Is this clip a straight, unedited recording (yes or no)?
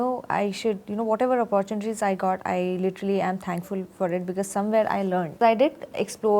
no